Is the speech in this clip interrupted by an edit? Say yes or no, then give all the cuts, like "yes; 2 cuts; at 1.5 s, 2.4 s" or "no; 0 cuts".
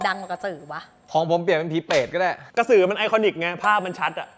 yes; 2 cuts; at 1.0 s, 2.4 s